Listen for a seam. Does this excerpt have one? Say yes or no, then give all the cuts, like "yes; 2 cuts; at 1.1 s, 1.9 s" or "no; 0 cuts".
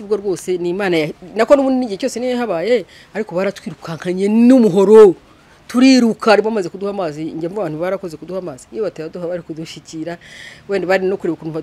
no; 0 cuts